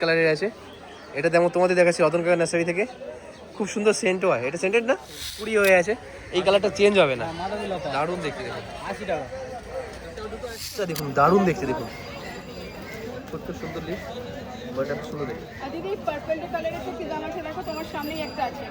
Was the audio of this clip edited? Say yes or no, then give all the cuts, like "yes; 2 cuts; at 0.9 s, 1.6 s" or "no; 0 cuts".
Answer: yes; 2 cuts; at 5.4 s, 10.9 s